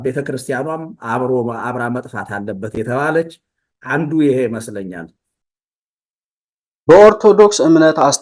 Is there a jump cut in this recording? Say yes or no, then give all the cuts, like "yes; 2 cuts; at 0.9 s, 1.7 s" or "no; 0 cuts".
no; 0 cuts